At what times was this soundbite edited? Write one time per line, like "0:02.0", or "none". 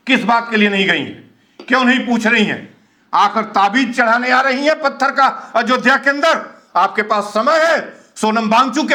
none

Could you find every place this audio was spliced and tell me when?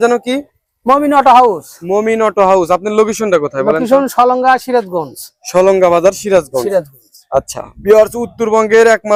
none

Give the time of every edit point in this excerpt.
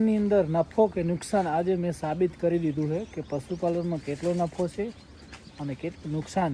none

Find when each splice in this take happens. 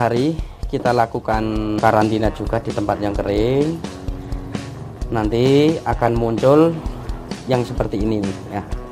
0:01.8

